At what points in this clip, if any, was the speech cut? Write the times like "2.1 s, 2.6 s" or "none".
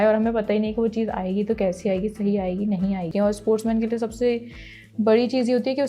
3.1 s